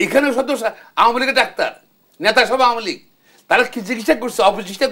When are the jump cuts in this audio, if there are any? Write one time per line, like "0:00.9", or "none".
none